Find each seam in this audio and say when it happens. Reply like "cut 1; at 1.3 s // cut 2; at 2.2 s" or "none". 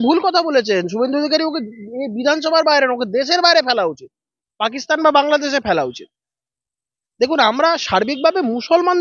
none